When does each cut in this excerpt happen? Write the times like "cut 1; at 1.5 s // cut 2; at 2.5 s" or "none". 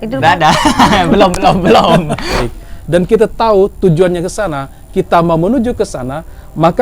cut 1; at 2.5 s